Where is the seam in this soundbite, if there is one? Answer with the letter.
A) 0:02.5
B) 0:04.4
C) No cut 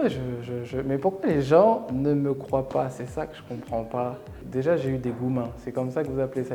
B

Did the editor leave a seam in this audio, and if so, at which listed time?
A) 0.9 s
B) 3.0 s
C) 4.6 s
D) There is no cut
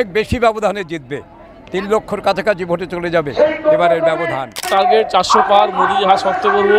C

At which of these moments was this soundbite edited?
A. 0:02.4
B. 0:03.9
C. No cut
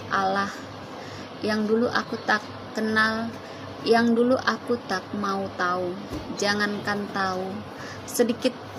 C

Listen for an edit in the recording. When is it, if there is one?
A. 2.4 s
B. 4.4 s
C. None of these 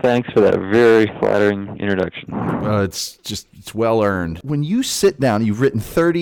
B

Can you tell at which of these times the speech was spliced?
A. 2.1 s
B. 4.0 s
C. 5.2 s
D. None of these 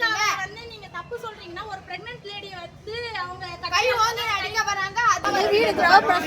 C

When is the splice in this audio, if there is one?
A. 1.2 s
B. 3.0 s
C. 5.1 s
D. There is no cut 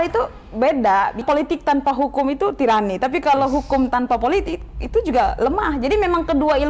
A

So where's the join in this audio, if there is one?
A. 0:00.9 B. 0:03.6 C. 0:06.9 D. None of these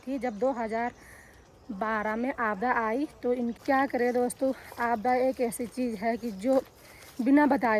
B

